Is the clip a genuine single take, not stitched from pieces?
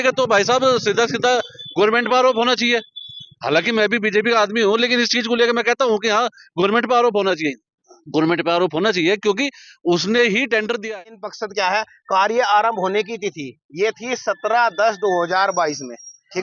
no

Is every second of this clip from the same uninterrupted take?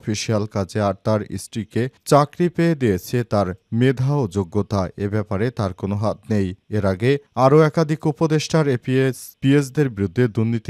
yes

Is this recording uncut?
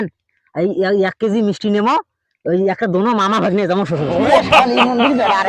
yes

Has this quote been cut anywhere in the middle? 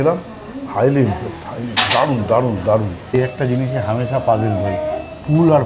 yes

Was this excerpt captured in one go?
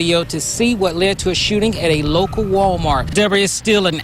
no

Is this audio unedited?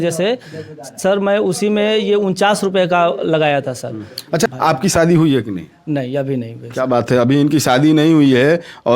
no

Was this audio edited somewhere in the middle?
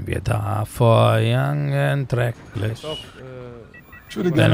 no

